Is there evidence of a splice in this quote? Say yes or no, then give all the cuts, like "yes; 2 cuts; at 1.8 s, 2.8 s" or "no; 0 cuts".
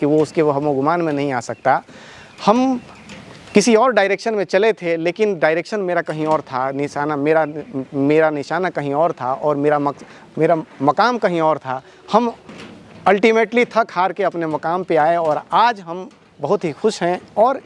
no; 0 cuts